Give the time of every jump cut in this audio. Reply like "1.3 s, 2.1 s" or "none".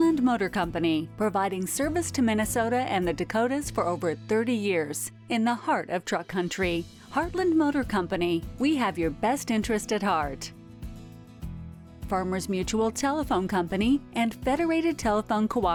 none